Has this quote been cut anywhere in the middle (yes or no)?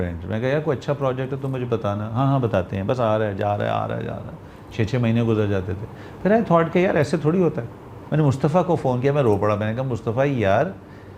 yes